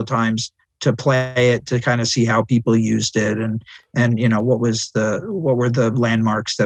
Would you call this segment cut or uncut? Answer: uncut